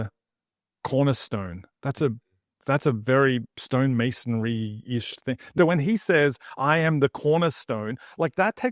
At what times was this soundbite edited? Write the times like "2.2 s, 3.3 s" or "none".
5.4 s

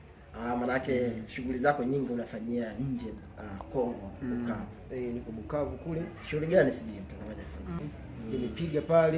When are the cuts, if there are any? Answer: 7.8 s

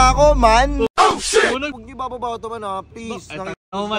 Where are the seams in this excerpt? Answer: 1.7 s

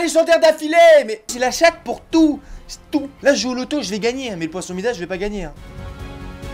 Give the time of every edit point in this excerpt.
none

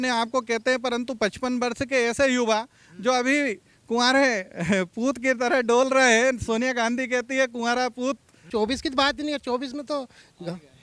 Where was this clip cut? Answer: 8.4 s

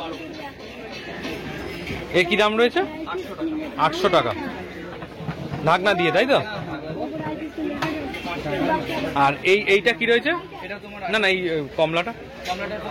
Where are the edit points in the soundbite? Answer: none

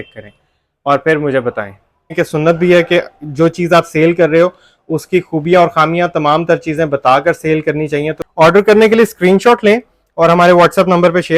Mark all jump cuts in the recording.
2.1 s, 8.2 s

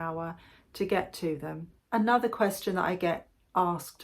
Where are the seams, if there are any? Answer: 1.7 s

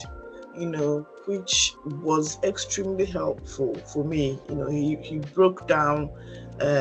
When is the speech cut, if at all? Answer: 1.6 s

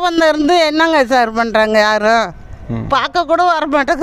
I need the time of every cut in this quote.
none

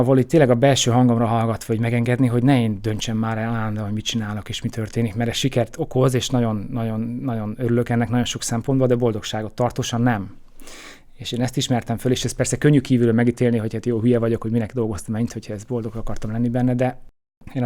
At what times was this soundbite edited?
none

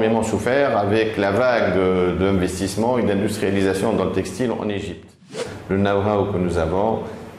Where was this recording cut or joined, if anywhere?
5.5 s

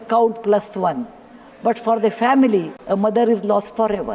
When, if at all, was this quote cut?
2.8 s

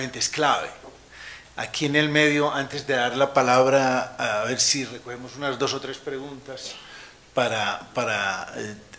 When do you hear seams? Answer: 5.3 s

